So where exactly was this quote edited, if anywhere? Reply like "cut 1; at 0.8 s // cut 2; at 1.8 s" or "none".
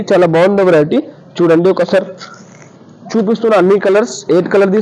none